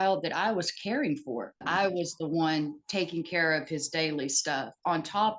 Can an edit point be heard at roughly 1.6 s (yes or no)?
yes